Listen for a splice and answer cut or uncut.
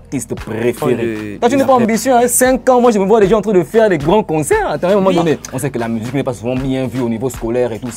cut